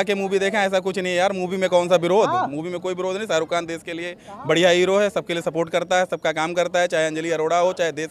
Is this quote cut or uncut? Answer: uncut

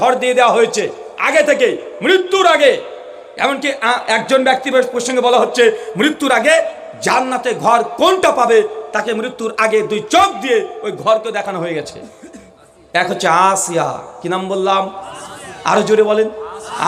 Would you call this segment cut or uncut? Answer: uncut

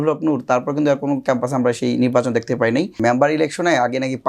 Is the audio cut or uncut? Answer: cut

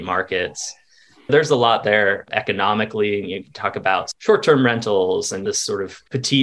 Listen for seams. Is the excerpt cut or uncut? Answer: cut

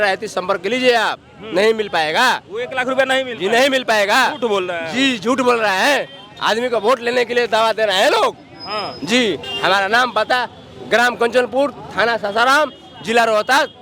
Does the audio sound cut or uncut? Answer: uncut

